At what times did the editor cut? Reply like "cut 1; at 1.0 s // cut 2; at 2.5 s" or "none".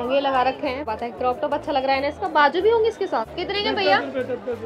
cut 1; at 0.9 s // cut 2; at 3.3 s